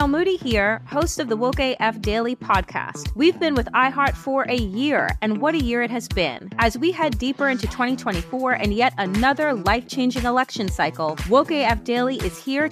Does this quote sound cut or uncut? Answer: uncut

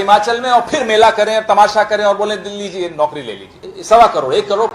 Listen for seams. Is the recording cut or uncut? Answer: cut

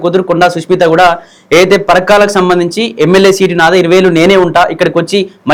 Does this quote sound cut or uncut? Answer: uncut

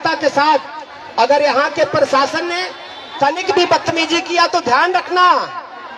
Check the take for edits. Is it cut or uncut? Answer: uncut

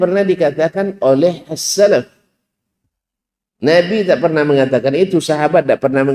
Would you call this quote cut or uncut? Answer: uncut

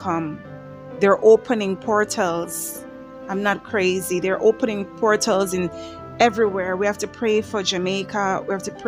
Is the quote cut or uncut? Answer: uncut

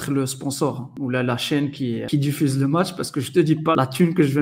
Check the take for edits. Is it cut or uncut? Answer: cut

